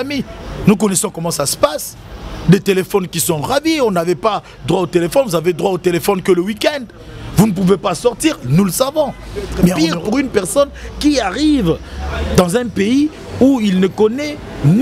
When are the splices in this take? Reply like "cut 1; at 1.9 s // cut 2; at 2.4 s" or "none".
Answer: cut 1; at 9.8 s